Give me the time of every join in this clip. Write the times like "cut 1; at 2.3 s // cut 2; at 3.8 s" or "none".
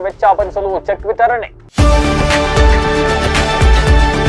cut 1; at 1.6 s